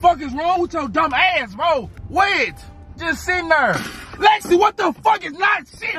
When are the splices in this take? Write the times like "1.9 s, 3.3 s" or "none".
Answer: 2.0 s